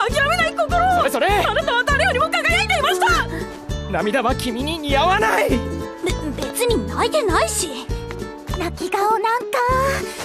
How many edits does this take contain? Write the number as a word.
zero